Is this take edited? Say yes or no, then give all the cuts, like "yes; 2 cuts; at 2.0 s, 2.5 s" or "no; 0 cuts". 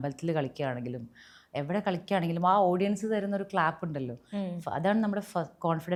no; 0 cuts